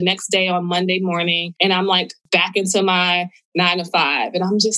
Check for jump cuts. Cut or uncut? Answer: cut